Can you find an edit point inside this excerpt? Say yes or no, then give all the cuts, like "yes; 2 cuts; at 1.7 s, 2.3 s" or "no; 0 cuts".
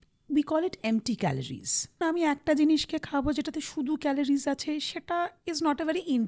yes; 1 cut; at 2.0 s